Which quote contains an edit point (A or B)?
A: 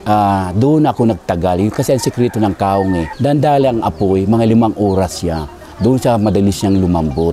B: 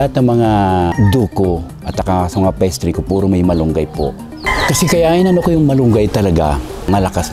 A